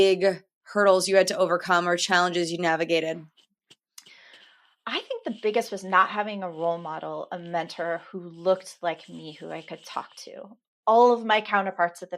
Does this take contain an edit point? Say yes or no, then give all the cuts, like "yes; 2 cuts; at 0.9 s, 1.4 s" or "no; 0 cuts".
yes; 1 cut; at 10.6 s